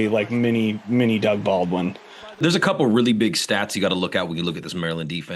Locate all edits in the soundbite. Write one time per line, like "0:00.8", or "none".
0:02.4